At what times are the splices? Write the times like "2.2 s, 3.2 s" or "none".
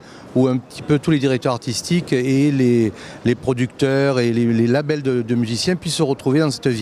2.6 s